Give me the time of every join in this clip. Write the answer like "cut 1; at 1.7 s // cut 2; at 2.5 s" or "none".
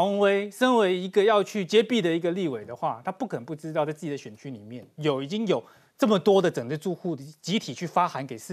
none